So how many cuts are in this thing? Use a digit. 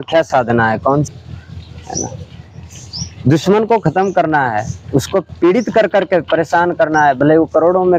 1